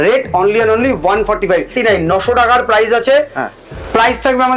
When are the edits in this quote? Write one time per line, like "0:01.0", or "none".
0:01.7

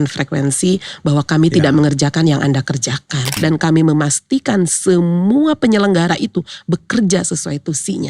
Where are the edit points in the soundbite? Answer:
0:03.2

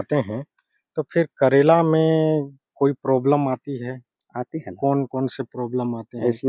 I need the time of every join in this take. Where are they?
none

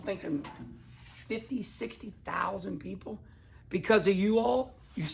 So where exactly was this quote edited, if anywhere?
none

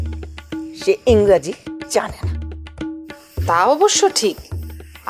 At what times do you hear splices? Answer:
none

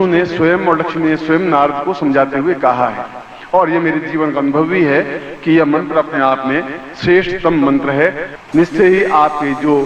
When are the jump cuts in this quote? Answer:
0:08.3

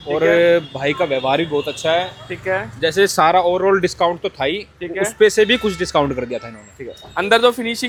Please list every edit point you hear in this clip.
none

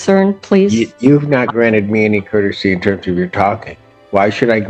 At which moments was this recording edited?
none

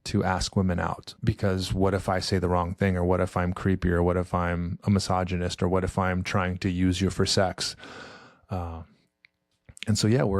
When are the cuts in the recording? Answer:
0:01.1

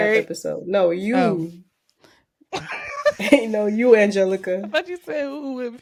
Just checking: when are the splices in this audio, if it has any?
none

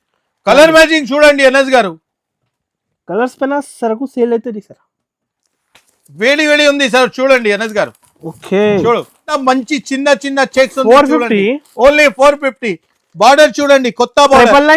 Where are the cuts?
0:09.4

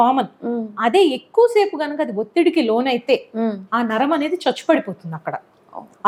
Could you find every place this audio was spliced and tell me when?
none

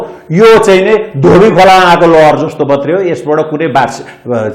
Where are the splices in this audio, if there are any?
none

